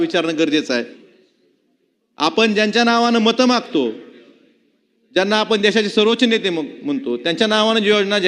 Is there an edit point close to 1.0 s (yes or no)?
yes